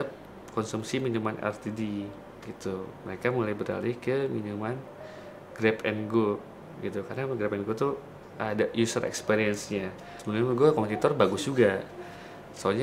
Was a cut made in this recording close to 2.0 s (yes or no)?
no